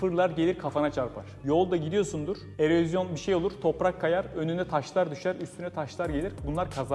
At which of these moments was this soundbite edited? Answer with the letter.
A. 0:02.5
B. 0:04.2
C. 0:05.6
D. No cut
D